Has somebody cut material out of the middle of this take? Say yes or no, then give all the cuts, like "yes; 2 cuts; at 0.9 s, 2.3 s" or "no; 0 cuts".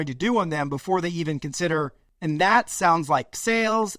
yes; 1 cut; at 2.0 s